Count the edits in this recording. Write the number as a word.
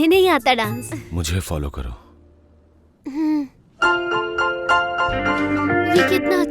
two